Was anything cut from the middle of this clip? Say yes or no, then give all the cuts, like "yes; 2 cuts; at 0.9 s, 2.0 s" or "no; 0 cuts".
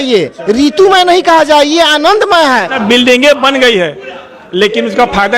yes; 1 cut; at 2.7 s